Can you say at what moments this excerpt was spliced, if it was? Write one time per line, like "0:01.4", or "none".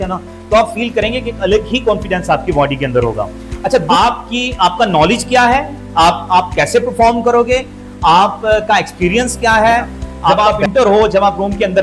0:03.8
0:10.3